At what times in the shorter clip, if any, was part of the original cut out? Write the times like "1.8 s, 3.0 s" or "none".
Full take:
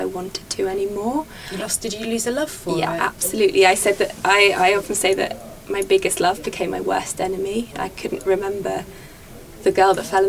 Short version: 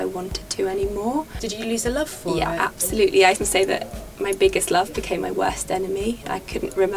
1.4 s, 3.4 s